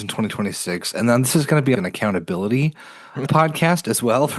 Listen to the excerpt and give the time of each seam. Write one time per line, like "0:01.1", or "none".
none